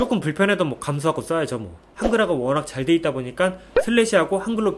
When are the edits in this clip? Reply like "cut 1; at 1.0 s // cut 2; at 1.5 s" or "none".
cut 1; at 1.9 s